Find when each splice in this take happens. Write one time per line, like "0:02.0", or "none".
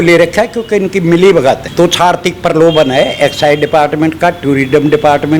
0:01.6